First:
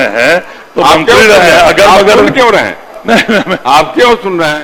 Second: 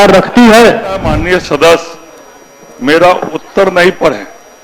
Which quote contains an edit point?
second; 1 cut; at 1.1 s

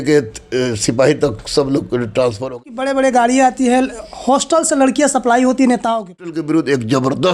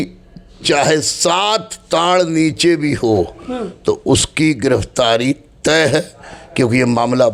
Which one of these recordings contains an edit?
first; 2 cuts; at 2.6 s, 6.4 s

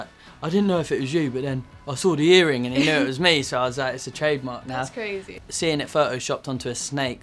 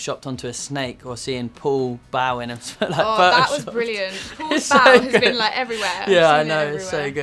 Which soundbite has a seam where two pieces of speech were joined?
first; 1 cut; at 5.3 s

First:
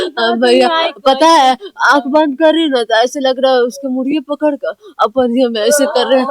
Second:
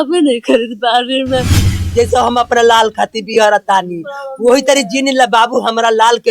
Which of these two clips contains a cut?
second; 1 cut; at 1.5 s

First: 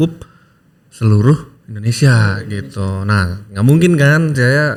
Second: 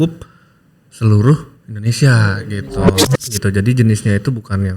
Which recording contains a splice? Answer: second; 1 cut; at 3.0 s

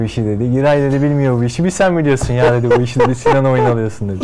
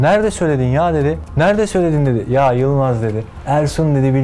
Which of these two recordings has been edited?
second; 2 cuts; at 1.2 s, 3.3 s

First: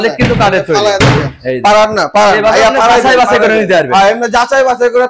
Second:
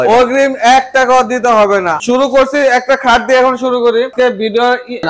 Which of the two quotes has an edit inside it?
second; 2 cuts; at 2.0 s, 4.1 s

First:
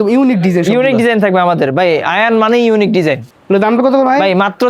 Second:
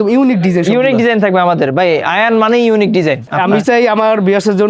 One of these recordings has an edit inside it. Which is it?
second; 1 cut; at 3.3 s

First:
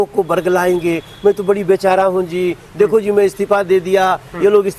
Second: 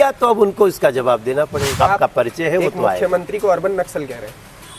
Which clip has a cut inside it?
second; 1 cut; at 1.8 s

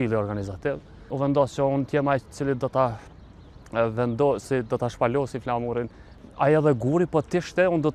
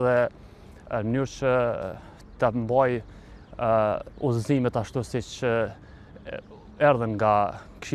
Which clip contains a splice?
first; 2 cuts; at 1.1 s, 6.2 s

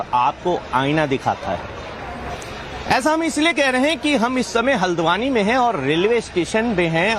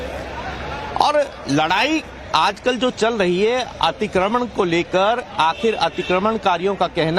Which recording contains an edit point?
first; 1 cut; at 1.8 s

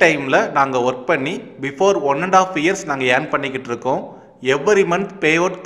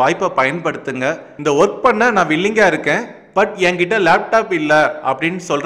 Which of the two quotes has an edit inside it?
second; 1 cut; at 1.3 s

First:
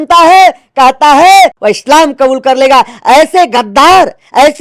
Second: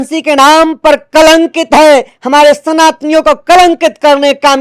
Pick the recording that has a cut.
first; 1 cut; at 1.6 s

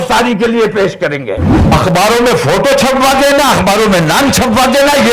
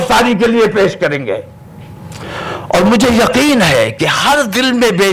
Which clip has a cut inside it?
first; 1 cut; at 1.5 s

